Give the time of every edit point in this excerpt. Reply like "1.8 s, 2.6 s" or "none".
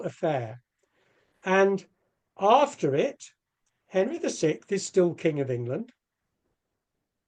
none